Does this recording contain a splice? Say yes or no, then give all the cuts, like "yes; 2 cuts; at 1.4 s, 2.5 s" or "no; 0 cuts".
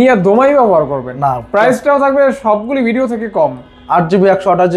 no; 0 cuts